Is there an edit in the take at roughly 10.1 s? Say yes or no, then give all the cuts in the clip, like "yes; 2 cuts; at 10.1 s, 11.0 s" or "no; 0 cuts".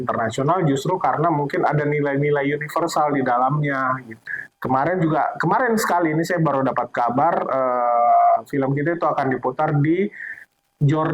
no; 1 cut; at 4.2 s